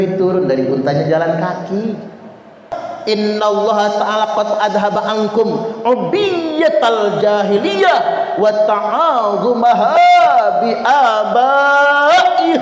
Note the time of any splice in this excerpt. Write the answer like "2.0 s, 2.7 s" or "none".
2.8 s